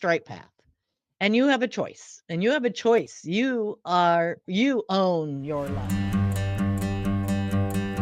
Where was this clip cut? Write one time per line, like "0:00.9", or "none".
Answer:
0:05.7